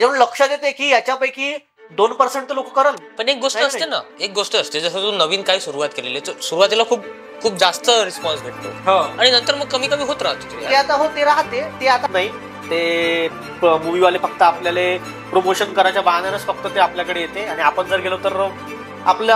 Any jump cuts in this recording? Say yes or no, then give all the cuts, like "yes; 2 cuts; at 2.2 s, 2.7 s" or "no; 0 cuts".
yes; 1 cut; at 12.0 s